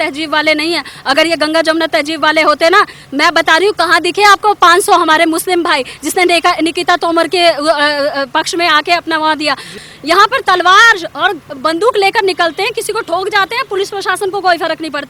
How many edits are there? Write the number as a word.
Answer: one